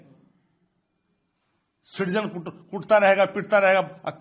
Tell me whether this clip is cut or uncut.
uncut